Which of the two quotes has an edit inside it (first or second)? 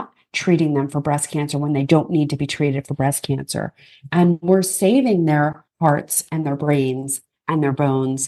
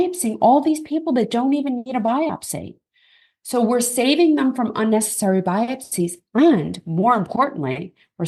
first